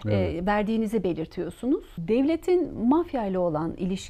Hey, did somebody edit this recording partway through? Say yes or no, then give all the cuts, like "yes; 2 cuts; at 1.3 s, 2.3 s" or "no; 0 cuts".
yes; 1 cut; at 1.9 s